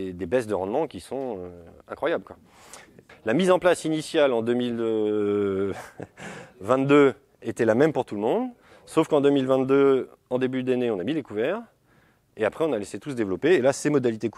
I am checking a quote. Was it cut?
no; 0 cuts

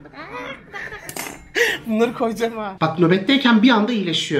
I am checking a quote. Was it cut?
yes; 1 cut; at 2.7 s

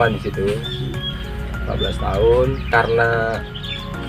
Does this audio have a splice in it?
yes; 2 cuts; at 1.2 s, 2.6 s

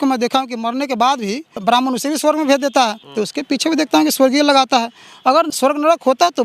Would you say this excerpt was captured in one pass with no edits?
no; 3 cuts; at 1.6 s, 3.0 s, 5.5 s

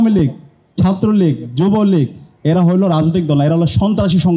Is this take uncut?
yes; 0 cuts

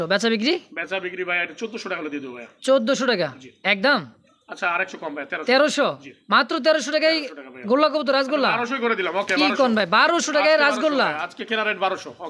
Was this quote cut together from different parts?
no; 0 cuts

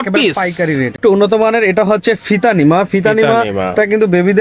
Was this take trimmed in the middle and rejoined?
yes; 1 cut; at 1.0 s

